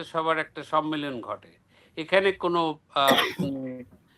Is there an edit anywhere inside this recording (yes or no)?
no